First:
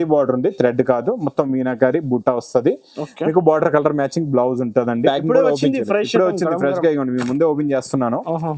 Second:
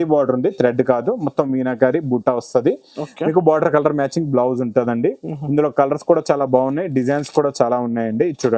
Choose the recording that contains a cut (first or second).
first